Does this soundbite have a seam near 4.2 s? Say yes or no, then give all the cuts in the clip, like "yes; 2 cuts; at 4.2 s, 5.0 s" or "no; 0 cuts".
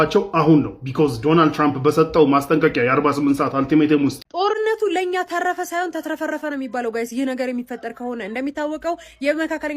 yes; 1 cut; at 4.2 s